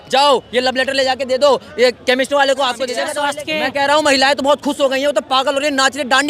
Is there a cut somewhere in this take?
yes; 1 cut; at 3.1 s

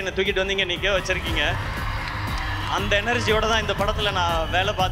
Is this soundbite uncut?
yes; 0 cuts

